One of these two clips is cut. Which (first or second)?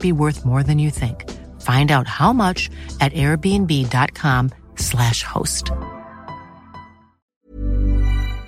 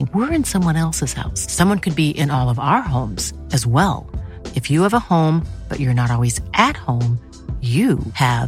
first